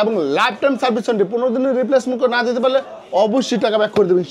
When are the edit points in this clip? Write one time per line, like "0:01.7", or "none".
none